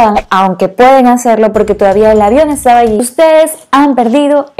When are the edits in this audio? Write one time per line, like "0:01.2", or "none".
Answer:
0:03.0